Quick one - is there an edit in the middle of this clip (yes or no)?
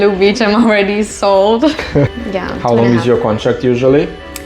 yes